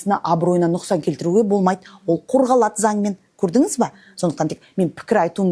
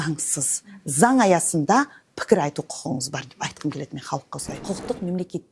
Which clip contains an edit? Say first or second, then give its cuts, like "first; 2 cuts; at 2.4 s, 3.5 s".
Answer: second; 1 cut; at 4.5 s